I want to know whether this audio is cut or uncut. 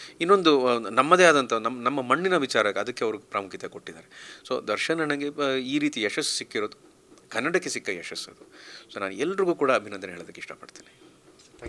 uncut